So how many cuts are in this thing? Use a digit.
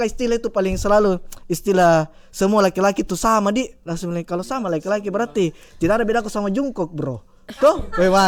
0